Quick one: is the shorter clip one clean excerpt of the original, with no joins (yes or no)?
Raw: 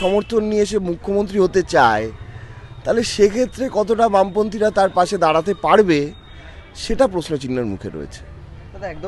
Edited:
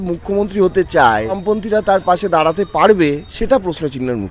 no